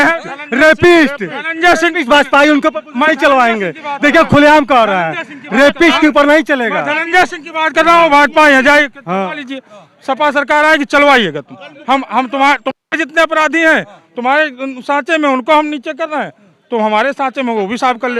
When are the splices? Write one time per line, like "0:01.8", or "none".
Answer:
none

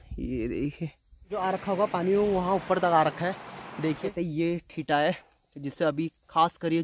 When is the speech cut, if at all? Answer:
0:01.2
0:04.1

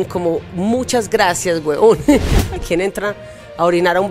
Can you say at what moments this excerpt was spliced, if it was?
0:02.5

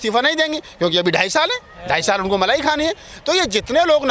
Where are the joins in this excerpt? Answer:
none

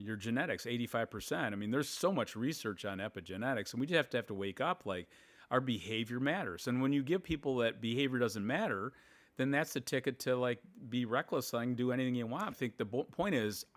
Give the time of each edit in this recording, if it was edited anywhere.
0:12.5

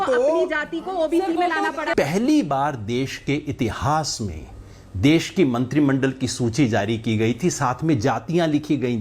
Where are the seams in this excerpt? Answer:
0:01.9

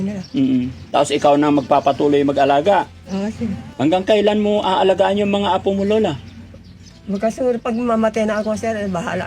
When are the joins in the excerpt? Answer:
0:03.6

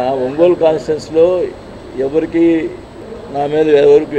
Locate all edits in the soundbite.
none

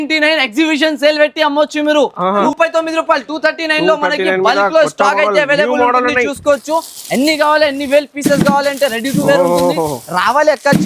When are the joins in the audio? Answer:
0:02.5

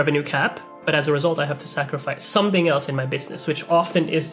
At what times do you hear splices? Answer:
none

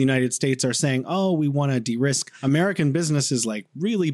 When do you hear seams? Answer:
none

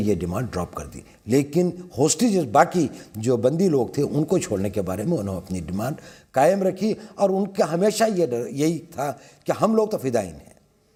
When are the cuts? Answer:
none

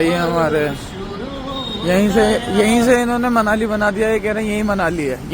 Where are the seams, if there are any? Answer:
none

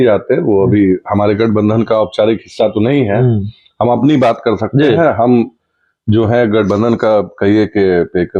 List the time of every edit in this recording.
none

